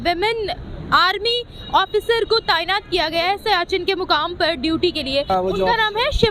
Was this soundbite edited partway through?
yes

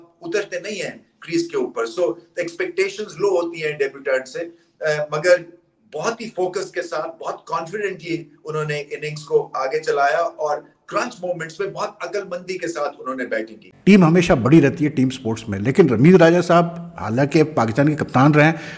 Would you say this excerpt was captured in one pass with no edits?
yes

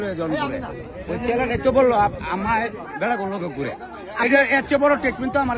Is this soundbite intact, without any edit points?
yes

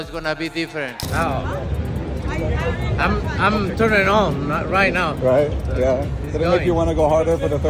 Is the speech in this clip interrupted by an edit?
yes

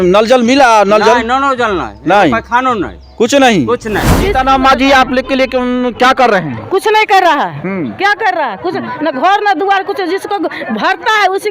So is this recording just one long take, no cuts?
no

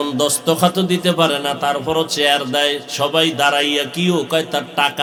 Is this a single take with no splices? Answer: yes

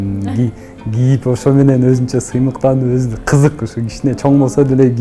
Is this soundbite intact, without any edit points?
yes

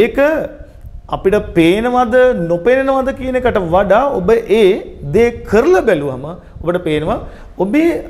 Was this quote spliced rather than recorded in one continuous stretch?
no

